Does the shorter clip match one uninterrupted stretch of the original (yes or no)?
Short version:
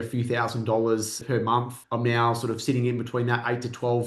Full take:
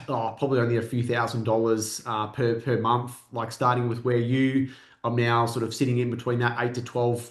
no